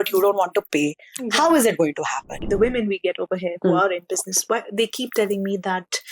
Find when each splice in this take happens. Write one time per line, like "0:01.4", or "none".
0:02.4